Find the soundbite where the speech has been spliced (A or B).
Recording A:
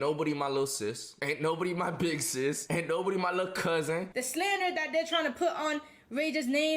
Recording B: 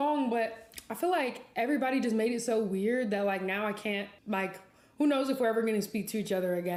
A